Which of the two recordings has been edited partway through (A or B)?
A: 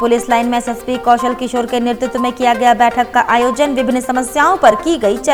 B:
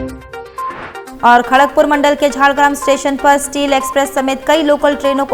B